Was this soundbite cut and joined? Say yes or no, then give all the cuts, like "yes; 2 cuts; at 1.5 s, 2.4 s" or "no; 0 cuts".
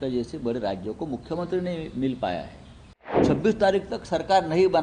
yes; 1 cut; at 3.2 s